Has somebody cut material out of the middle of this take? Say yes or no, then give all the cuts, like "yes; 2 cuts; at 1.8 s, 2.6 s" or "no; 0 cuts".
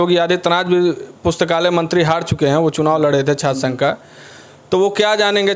no; 0 cuts